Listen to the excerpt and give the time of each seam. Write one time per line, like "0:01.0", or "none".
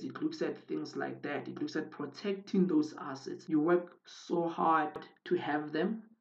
0:05.1